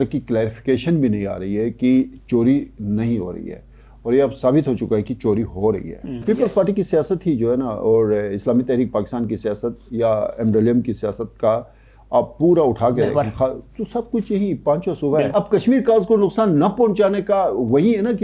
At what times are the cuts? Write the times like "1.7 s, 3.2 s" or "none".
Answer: 6.2 s, 15.3 s